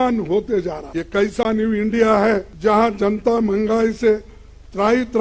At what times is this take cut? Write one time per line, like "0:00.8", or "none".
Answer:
0:00.8
0:02.5